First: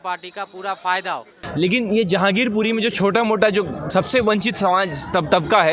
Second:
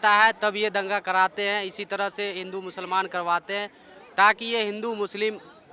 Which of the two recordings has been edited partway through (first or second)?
first